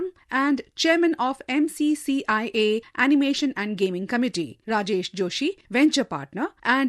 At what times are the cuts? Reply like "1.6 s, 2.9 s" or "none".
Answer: 4.6 s, 5.6 s